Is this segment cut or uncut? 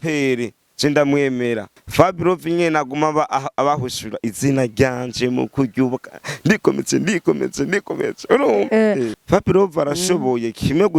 cut